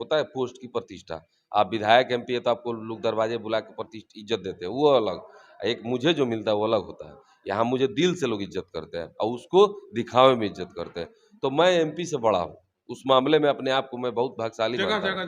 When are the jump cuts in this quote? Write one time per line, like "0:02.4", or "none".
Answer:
none